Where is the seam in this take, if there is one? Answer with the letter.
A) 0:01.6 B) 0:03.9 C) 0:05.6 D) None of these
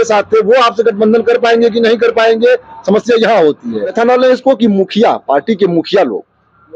B